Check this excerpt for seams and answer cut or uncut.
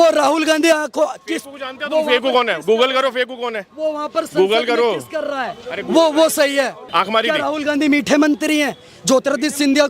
cut